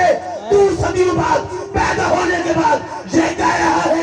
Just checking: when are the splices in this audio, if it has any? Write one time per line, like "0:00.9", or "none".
none